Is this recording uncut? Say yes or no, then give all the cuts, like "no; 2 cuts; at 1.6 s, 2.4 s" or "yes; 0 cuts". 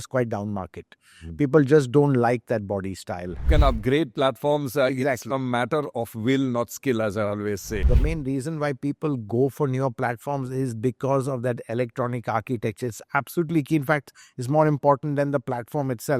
no; 2 cuts; at 3.5 s, 7.8 s